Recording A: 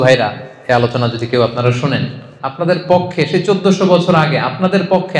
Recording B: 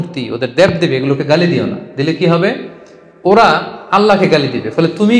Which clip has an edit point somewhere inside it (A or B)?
A